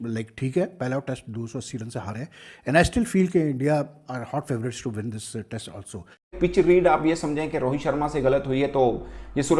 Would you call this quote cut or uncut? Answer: cut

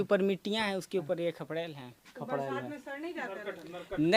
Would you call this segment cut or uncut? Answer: uncut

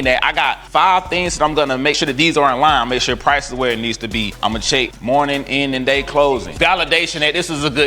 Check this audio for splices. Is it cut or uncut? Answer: uncut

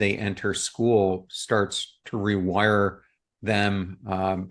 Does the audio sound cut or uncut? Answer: uncut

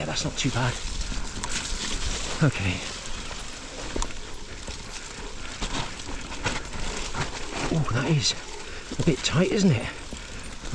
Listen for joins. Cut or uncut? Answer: uncut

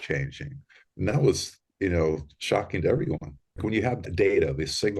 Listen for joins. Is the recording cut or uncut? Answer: cut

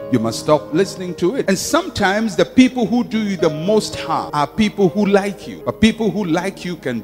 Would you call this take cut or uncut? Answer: cut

